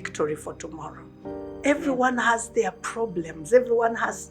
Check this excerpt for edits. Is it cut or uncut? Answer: cut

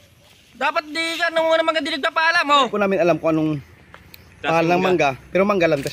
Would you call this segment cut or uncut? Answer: cut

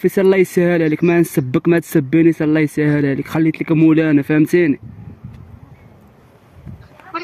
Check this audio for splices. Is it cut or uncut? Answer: uncut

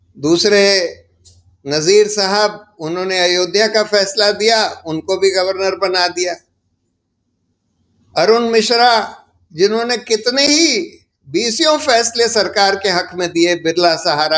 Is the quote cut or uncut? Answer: uncut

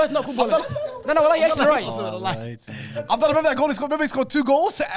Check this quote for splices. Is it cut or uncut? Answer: uncut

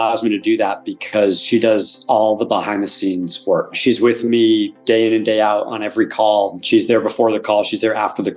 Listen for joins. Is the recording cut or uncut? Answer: cut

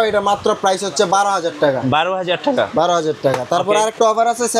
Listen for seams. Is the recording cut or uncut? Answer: uncut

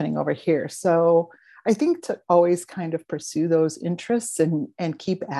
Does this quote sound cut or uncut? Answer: uncut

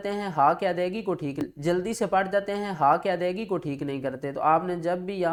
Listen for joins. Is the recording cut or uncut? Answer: uncut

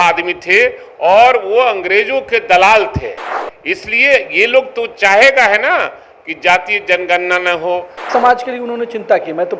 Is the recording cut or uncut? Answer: cut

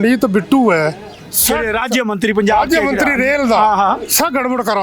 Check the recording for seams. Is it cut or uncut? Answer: uncut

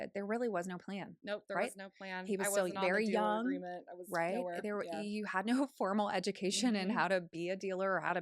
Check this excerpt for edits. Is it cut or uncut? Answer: uncut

